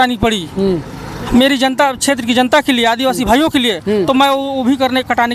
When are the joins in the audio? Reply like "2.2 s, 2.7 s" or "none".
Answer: none